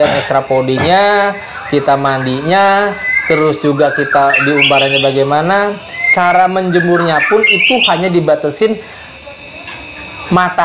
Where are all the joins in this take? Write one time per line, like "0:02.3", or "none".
none